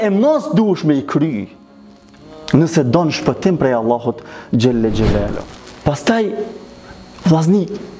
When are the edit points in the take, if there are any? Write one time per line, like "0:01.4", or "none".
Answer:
0:05.4